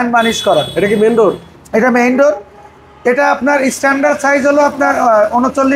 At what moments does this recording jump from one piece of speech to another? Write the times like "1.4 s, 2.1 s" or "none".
none